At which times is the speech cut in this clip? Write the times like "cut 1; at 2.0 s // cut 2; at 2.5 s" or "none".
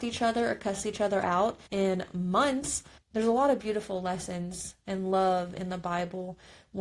cut 1; at 1.6 s // cut 2; at 3.0 s